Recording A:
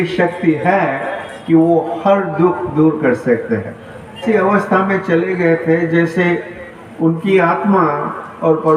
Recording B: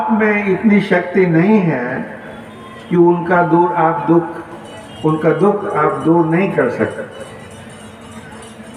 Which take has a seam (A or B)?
A